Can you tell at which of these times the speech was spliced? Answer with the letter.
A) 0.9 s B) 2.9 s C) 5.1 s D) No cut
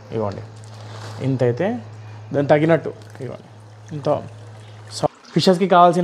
C